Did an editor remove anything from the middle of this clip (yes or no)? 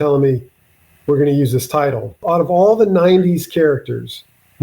yes